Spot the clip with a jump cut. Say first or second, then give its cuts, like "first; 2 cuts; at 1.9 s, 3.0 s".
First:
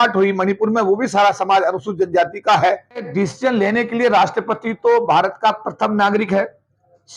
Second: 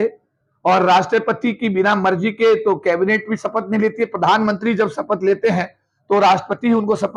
first; 1 cut; at 3.1 s